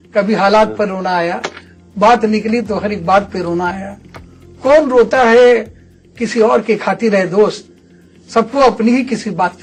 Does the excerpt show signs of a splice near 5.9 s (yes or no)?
no